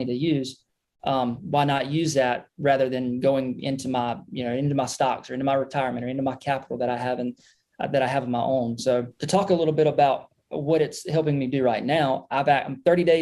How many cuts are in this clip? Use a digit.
1